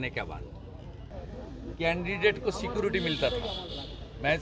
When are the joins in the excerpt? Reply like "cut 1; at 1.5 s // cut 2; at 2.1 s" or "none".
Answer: cut 1; at 1.2 s